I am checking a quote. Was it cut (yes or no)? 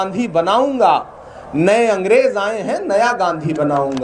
no